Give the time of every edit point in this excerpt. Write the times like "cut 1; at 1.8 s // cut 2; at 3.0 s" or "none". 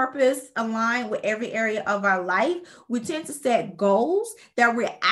none